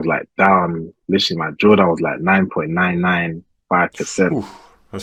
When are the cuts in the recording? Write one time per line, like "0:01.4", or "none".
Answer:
none